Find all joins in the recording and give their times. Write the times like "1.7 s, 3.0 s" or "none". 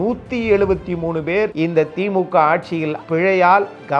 3.0 s